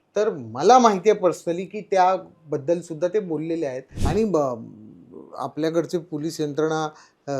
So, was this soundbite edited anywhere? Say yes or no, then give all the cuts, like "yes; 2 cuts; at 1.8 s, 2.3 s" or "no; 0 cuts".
yes; 1 cut; at 3.9 s